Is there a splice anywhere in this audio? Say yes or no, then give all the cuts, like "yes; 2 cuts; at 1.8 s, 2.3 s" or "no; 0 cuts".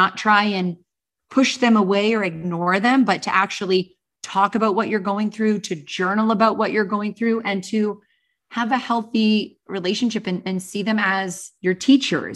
yes; 1 cut; at 11.5 s